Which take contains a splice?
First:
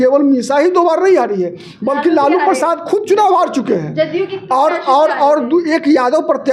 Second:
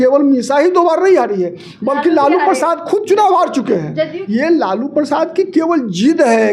second; 1 cut; at 4.2 s

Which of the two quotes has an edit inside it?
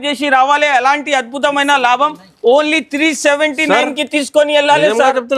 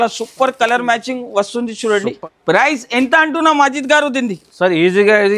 second; 1 cut; at 2.1 s

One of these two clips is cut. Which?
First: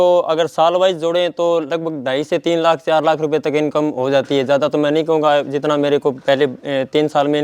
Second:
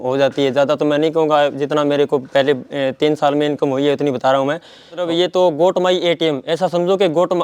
second; 1 cut; at 5.0 s

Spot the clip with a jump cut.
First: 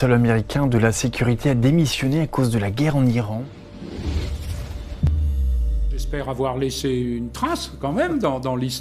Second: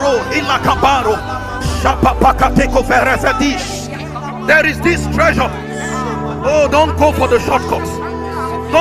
first; 2 cuts; at 3.3 s, 6.4 s

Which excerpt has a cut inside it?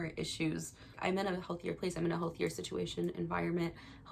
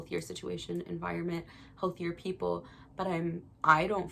first; 1 cut; at 1.0 s

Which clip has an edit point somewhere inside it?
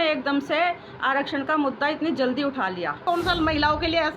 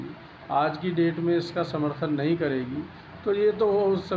first; 1 cut; at 3.0 s

